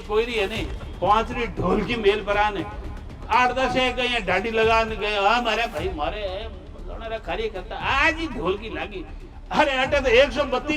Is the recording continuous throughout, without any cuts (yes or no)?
yes